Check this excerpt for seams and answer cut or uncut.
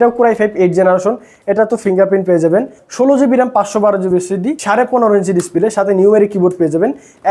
uncut